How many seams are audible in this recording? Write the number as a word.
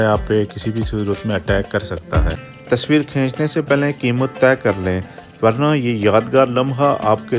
one